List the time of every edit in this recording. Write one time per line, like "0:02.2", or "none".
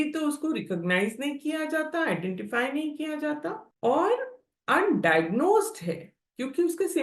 0:03.7

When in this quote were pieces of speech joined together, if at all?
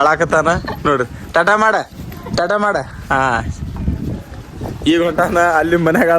none

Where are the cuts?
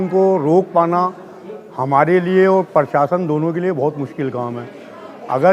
none

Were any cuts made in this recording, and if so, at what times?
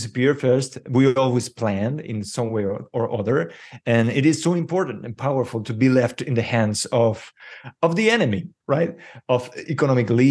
none

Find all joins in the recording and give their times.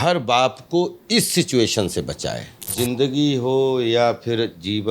0:02.7

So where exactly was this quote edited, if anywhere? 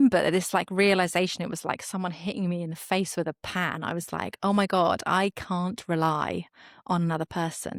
none

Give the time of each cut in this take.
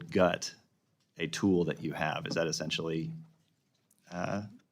none

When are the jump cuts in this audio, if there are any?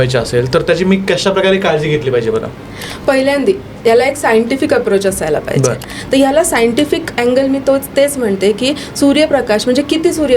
0:05.9

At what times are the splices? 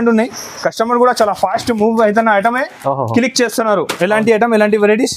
none

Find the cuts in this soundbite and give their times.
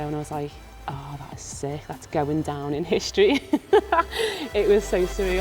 none

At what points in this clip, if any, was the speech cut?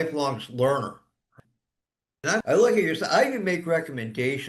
0:01.4

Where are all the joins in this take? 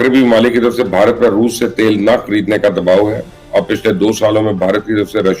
none

